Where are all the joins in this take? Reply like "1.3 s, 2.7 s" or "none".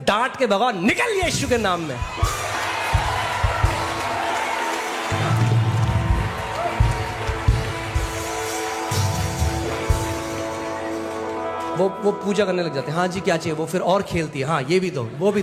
none